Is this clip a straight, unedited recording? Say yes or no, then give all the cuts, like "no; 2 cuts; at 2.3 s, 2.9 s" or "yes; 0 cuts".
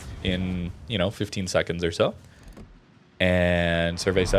yes; 0 cuts